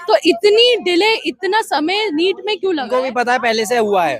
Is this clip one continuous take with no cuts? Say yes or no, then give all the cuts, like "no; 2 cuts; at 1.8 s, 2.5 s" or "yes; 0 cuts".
no; 1 cut; at 2.9 s